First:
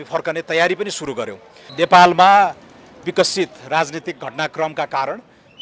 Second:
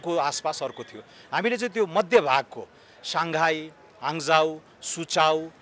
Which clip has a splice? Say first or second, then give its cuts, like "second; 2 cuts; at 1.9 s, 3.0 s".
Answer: first; 1 cut; at 1.6 s